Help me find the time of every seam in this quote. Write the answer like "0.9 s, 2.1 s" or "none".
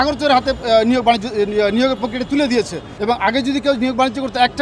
2.8 s